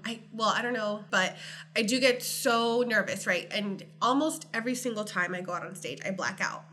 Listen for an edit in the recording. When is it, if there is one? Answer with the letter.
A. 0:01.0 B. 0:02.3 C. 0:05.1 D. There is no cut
A